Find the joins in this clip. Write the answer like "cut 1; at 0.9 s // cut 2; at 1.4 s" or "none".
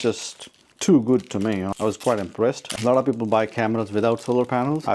none